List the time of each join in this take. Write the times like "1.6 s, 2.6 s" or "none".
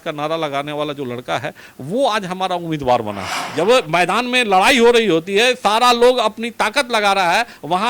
3.3 s